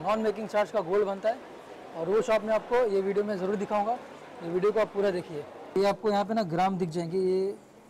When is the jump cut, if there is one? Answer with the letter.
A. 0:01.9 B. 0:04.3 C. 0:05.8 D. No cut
C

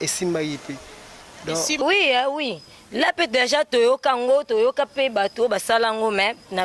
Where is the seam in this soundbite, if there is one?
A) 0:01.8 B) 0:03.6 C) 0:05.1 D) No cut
A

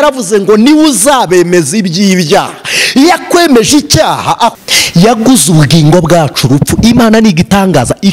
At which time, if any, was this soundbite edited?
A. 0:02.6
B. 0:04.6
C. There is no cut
B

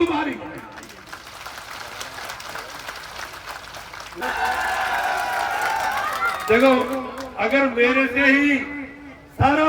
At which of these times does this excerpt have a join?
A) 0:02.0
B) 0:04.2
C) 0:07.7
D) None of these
B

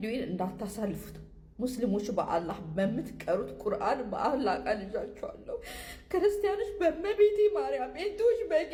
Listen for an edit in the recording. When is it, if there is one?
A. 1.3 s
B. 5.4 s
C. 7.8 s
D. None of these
D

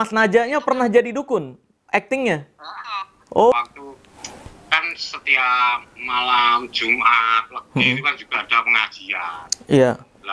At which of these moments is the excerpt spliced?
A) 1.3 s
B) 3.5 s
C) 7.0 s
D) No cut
B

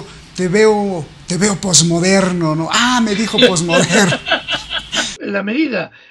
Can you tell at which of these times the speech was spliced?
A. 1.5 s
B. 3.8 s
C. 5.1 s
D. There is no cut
C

